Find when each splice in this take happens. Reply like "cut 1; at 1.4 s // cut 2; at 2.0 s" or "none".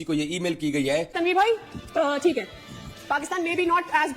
cut 1; at 1.1 s